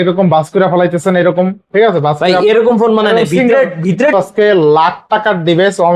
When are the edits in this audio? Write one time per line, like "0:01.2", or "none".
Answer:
0:04.1

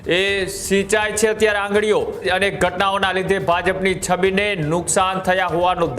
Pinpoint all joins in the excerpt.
0:02.3

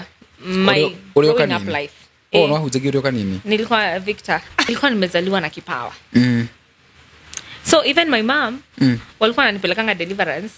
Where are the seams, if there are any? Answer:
0:04.7

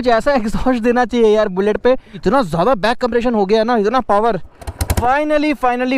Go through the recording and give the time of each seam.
0:02.2
0:04.9

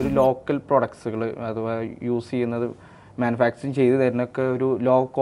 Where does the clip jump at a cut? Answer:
none

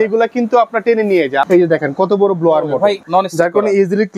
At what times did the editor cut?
0:01.5
0:03.0

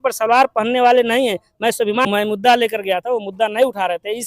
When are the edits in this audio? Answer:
0:02.0

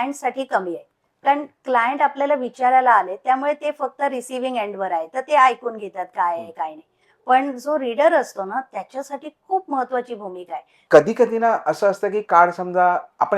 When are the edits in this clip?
0:10.8

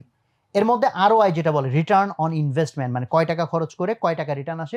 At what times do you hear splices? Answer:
none

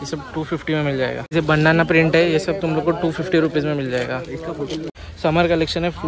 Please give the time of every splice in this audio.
0:01.0
0:04.9

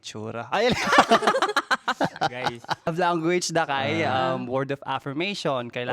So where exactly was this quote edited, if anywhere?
0:02.9

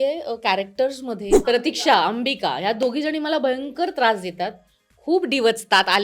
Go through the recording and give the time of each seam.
0:01.4

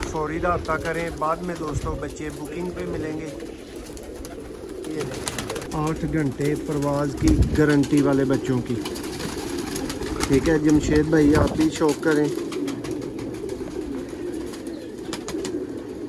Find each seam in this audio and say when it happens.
0:05.6

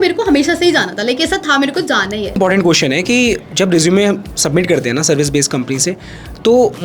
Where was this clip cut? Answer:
0:02.4

